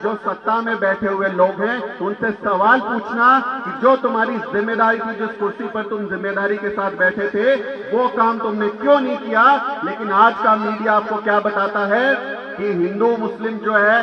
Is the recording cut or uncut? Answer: uncut